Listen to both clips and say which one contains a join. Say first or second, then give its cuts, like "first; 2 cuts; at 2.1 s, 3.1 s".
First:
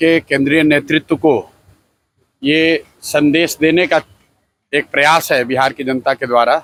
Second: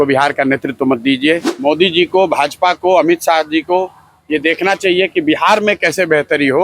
second; 1 cut; at 1.5 s